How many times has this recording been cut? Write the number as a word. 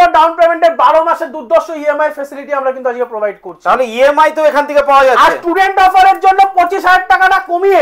zero